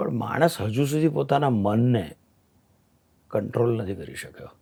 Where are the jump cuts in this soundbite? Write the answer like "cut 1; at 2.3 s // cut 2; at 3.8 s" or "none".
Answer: none